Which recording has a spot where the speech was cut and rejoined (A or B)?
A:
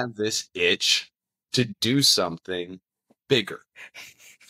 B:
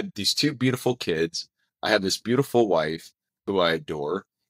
B